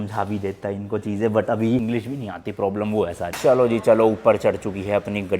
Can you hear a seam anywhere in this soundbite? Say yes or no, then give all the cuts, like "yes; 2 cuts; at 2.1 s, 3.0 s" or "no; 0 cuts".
yes; 2 cuts; at 1.8 s, 3.3 s